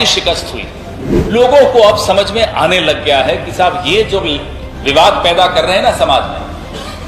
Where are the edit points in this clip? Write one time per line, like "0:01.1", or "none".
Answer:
0:01.3

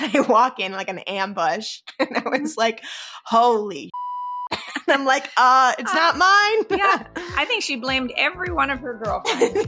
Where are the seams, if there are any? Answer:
none

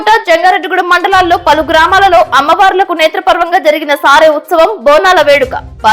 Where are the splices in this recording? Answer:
none

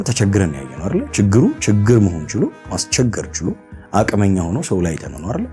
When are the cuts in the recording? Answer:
none

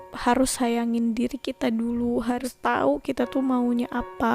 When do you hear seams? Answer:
0:02.5

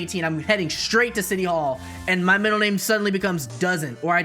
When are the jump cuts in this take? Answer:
none

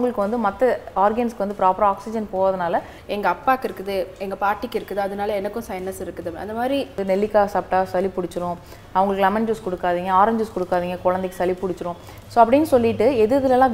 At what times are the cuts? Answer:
0:03.0
0:07.0

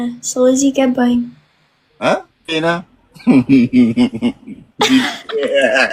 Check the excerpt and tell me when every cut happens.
0:02.5

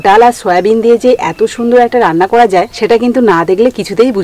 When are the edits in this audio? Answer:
0:02.7

